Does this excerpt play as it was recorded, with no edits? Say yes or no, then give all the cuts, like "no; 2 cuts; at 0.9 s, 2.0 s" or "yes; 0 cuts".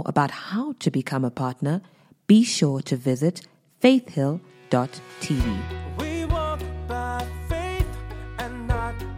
no; 1 cut; at 5.8 s